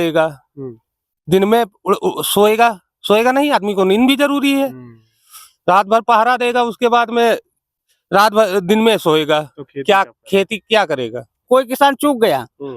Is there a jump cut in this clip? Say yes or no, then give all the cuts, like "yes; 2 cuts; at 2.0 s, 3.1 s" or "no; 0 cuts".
yes; 1 cut; at 11.4 s